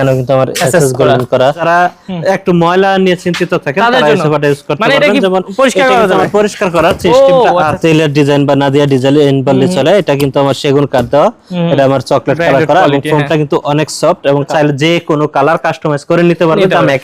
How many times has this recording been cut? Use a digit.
3